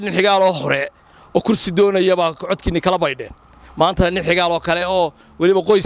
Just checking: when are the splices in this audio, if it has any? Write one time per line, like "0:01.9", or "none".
none